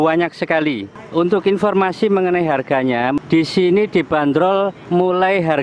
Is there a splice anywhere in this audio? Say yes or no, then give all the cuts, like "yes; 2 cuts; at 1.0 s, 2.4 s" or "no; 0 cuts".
yes; 2 cuts; at 0.9 s, 3.2 s